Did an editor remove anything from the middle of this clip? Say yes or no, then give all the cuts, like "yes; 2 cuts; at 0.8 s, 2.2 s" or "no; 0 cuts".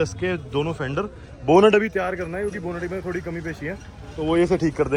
no; 0 cuts